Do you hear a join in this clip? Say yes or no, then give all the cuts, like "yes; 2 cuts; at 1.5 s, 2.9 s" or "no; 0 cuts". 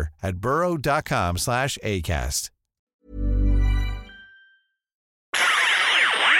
yes; 1 cut; at 5.3 s